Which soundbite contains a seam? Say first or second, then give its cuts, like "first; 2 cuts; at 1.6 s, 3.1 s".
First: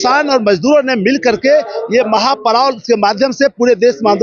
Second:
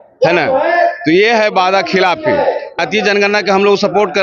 second; 1 cut; at 2.8 s